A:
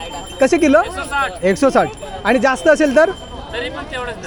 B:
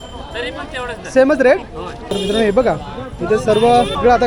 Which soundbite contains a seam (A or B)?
B